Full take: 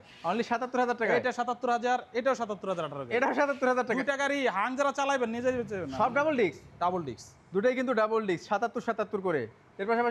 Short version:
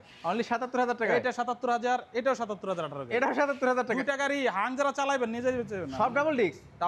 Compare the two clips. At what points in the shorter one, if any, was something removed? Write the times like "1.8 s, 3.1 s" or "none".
none